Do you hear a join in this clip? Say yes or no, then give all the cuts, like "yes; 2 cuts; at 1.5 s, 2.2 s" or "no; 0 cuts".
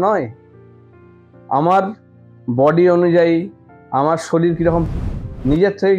yes; 1 cut; at 4.8 s